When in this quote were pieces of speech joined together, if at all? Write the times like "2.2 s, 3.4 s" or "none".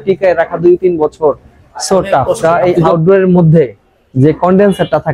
2.4 s